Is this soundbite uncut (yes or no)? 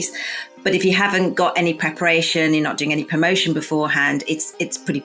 yes